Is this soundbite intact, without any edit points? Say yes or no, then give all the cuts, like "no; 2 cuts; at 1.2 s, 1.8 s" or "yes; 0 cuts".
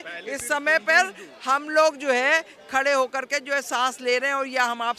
yes; 0 cuts